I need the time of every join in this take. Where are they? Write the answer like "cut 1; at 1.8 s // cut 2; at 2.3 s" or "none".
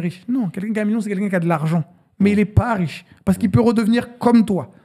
none